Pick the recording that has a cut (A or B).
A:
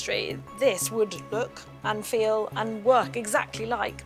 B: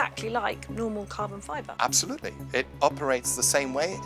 B